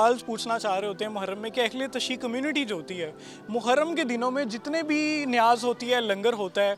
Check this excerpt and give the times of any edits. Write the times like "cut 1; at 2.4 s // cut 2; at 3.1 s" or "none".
none

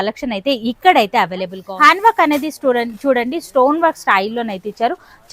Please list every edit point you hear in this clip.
cut 1; at 1.6 s

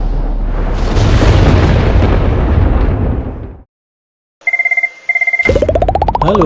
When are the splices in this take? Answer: cut 1; at 4.3 s

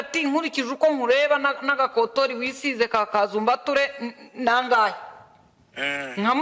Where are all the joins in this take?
none

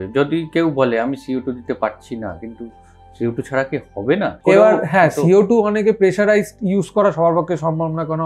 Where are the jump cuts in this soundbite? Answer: cut 1; at 4.4 s

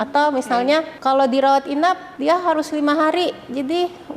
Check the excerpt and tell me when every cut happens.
cut 1; at 0.9 s // cut 2; at 2.1 s

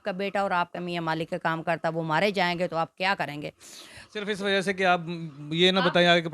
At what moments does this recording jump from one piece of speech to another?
none

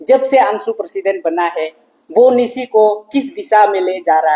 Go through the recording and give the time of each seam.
none

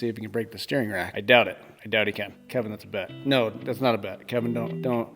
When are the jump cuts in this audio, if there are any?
cut 1; at 1.1 s

